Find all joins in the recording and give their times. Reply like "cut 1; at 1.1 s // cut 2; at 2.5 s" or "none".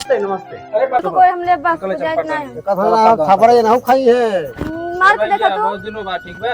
cut 1; at 1.0 s